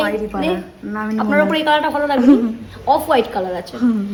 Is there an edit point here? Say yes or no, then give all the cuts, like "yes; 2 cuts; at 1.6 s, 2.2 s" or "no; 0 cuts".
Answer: no; 0 cuts